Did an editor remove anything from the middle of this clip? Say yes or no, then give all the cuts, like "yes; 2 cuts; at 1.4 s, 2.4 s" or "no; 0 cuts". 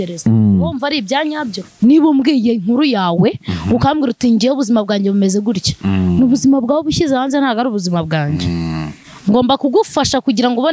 yes; 1 cut; at 1.6 s